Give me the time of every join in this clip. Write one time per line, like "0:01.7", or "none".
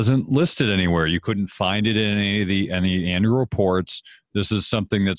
none